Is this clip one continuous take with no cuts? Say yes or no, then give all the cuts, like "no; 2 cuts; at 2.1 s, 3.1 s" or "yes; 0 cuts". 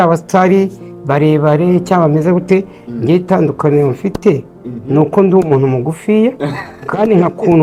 yes; 0 cuts